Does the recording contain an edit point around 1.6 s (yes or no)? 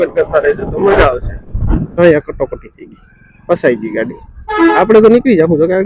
yes